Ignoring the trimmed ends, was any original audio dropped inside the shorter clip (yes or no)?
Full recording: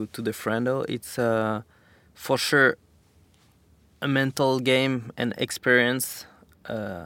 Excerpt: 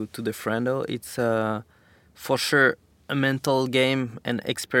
yes